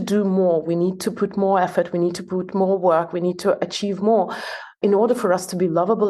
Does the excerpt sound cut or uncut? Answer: cut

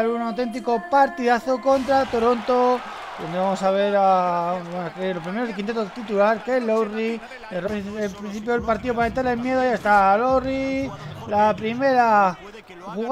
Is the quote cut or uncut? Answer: uncut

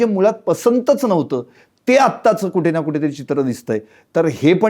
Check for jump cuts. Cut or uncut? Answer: uncut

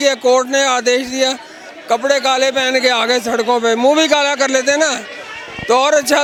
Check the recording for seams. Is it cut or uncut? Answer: uncut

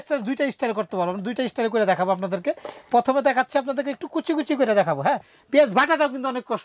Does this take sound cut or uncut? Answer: cut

